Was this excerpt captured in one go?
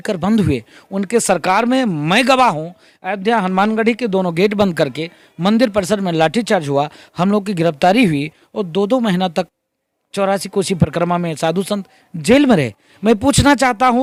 yes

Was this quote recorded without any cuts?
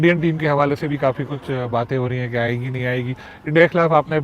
yes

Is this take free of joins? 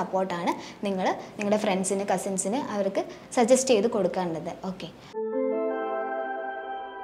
no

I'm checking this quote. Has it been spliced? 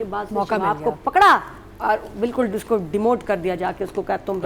no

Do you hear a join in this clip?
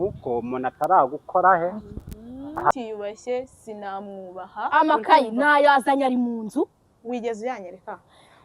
yes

